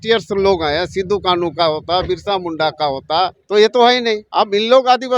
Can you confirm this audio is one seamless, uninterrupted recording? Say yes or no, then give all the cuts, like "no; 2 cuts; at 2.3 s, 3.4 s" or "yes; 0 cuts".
no; 2 cuts; at 3.4 s, 4.2 s